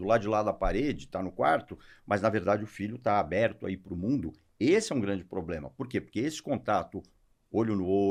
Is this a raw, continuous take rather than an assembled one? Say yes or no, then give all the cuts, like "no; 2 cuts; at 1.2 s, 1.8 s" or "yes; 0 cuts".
yes; 0 cuts